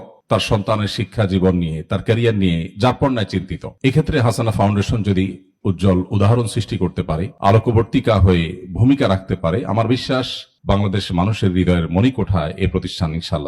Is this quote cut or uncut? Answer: uncut